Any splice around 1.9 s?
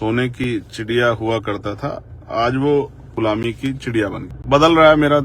no; 2 cuts; at 3.1 s, 4.3 s

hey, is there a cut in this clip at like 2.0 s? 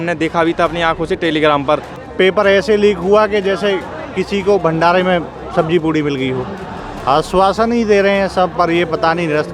yes; 2 cuts; at 2.0 s, 6.9 s

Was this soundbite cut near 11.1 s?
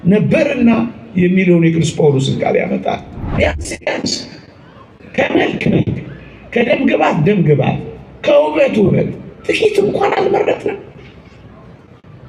no; 1 cut; at 3.2 s

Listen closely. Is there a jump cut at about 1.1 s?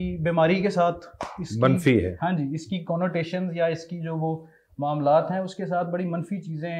no; 0 cuts

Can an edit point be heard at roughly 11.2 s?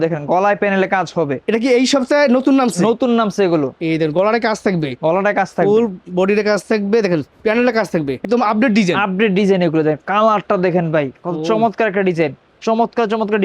no; 2 cuts; at 8.2 s, 12.5 s

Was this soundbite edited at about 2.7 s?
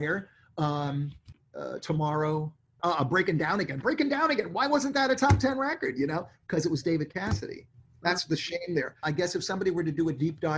yes; 1 cut; at 2.7 s

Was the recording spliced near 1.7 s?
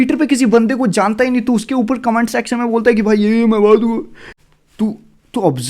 no; 1 cut; at 4.3 s

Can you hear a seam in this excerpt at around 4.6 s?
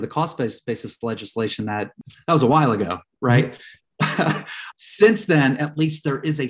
yes; 2 cuts; at 2.0 s, 4.6 s

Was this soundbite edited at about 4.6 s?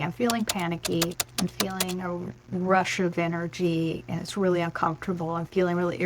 no; 1 cut; at 1.2 s

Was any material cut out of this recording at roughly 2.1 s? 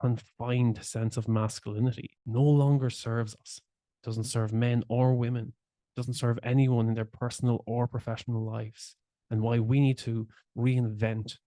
yes; 1 cut; at 2.1 s

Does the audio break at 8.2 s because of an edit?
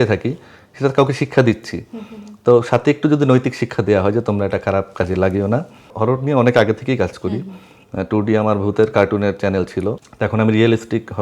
no; 2 cuts; at 5.9 s, 10.1 s

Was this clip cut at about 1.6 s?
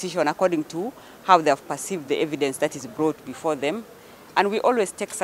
no; 1 cut; at 3.9 s

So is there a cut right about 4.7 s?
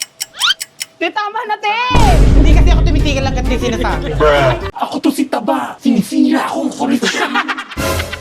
yes; 1 cut; at 4.7 s

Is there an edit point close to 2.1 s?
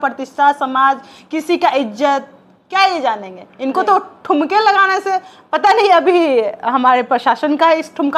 no; 0 cuts

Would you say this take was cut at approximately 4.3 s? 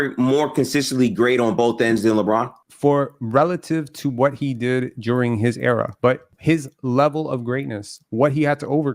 no; 2 cuts; at 2.6 s, 6.0 s

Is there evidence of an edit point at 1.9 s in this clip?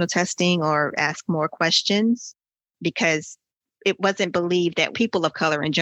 no; 2 cuts; at 3.6 s, 4.9 s

